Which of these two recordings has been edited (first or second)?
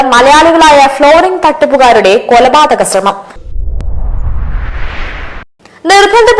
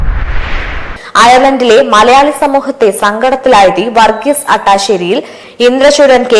second